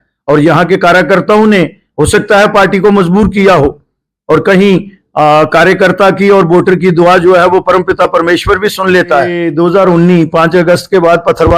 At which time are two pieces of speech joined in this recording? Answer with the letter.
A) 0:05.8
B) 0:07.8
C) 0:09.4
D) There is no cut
C